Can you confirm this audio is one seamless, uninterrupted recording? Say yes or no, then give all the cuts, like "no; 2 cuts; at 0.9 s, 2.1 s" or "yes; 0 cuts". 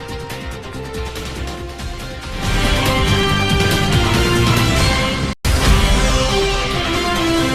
no; 2 cuts; at 1.2 s, 3.2 s